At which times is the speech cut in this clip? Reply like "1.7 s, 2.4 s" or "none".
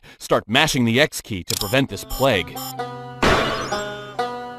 3.0 s, 3.7 s